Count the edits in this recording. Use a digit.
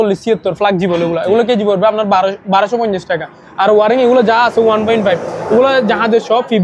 0